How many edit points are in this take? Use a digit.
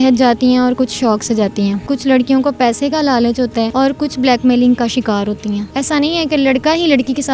3